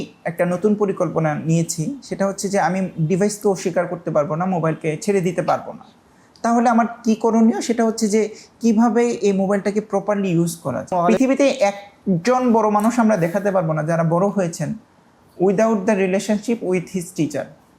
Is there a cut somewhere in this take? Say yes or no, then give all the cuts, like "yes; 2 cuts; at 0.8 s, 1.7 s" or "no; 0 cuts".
yes; 1 cut; at 10.9 s